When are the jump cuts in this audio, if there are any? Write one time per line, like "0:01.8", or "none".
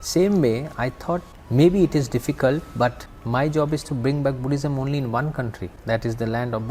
0:01.4
0:03.1
0:05.7